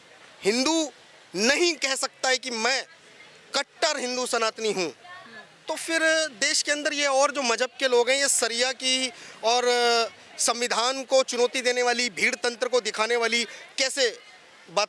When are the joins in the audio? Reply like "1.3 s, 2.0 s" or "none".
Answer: none